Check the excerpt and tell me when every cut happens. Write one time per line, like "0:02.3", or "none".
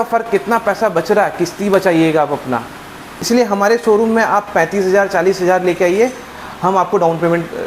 0:03.1